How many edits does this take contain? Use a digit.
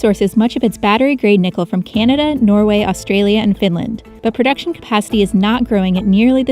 1